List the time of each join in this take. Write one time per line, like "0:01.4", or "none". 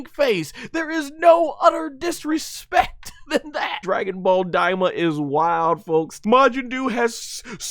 0:03.8
0:06.1